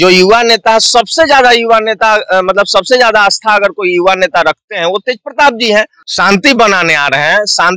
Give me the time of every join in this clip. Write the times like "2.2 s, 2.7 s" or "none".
6.0 s